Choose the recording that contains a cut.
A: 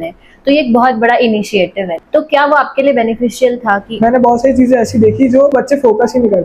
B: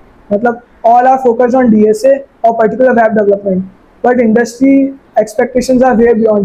A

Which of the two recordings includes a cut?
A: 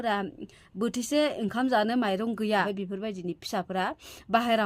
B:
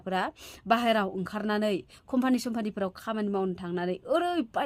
A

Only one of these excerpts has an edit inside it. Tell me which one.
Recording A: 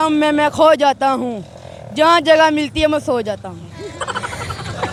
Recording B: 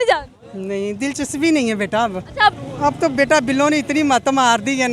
B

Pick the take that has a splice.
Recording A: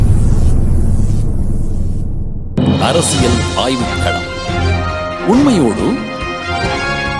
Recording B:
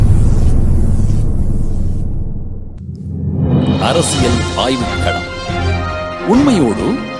A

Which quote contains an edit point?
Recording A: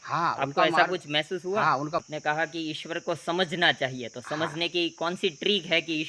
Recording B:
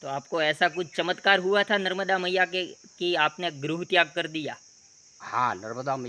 A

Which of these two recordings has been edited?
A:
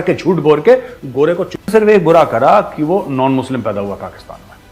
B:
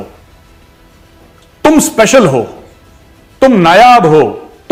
A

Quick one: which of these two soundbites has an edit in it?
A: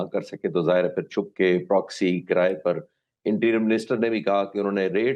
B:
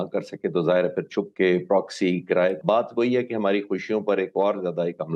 B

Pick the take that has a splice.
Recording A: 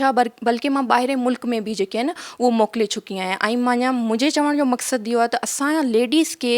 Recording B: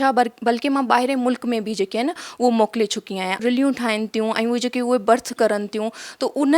B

